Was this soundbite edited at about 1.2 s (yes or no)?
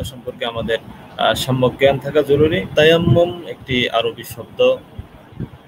no